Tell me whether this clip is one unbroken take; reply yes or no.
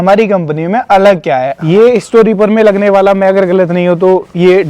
no